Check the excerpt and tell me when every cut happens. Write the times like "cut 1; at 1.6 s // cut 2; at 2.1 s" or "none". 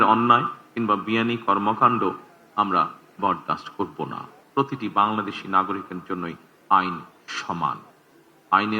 cut 1; at 4.3 s